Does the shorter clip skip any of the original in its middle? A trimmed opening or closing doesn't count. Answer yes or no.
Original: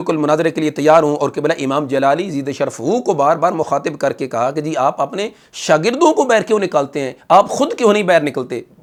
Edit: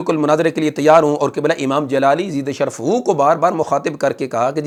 no